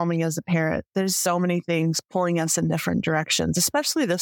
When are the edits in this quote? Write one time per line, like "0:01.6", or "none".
0:01.0